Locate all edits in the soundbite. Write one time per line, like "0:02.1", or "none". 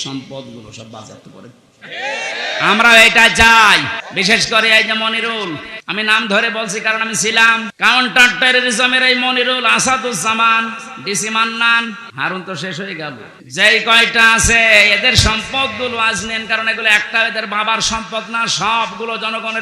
0:04.0
0:05.8
0:07.7
0:12.1
0:13.3